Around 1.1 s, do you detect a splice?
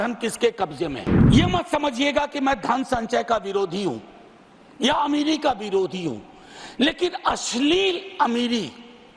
yes; 1 cut; at 1.1 s

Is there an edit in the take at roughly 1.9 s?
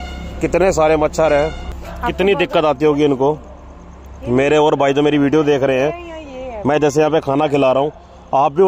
yes; 1 cut; at 1.9 s

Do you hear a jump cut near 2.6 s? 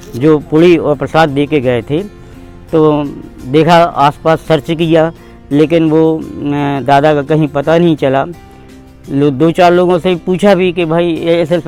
no; 0 cuts

